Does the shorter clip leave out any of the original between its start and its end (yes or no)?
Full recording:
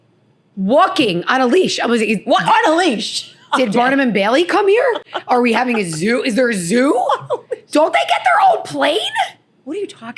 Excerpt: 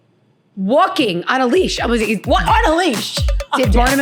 no